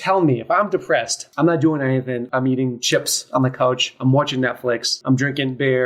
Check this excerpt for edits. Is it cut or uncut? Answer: cut